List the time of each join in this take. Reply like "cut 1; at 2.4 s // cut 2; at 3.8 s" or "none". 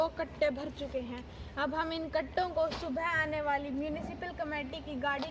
none